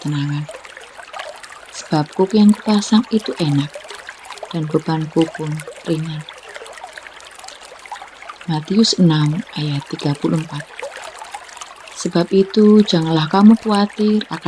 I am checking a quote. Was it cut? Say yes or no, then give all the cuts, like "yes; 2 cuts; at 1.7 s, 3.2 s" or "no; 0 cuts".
yes; 2 cuts; at 6.8 s, 8.1 s